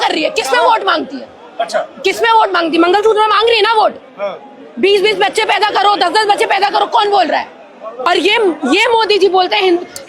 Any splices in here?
yes; 1 cut; at 8.1 s

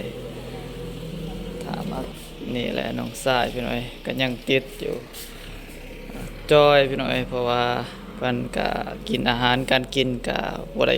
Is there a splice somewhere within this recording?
yes; 1 cut; at 2.1 s

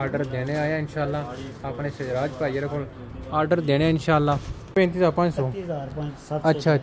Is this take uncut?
no; 1 cut; at 4.7 s

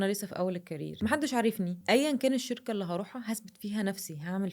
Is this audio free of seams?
no; 2 cuts; at 1.0 s, 1.8 s

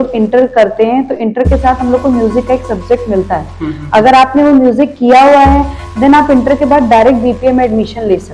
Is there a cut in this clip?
no; 0 cuts

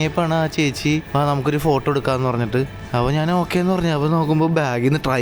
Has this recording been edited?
yes; 2 cuts; at 1.1 s, 2.8 s

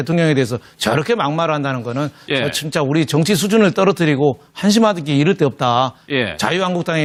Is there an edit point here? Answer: no; 0 cuts

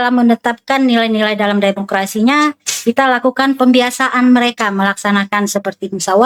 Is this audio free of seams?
yes; 0 cuts

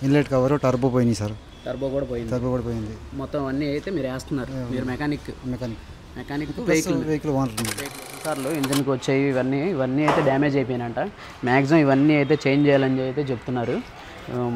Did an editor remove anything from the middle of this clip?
yes; 1 cut; at 8.4 s

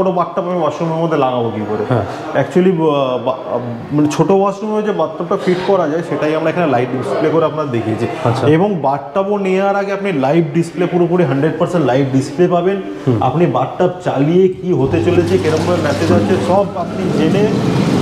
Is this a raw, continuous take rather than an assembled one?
yes; 0 cuts

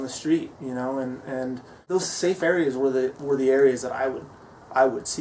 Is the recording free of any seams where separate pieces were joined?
no; 1 cut; at 1.8 s

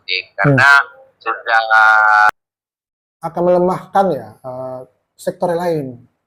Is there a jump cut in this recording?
yes; 1 cut; at 2.3 s

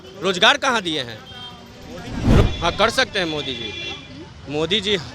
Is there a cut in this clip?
yes; 1 cut; at 2.4 s

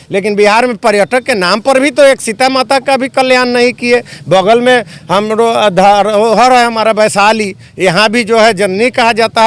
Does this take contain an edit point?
no; 0 cuts

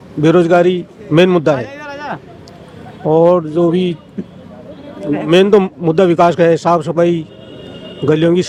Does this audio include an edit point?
no; 0 cuts

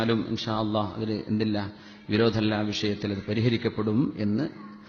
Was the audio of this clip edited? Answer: yes; 1 cut; at 3.1 s

